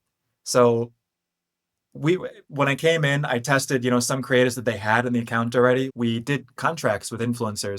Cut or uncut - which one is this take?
cut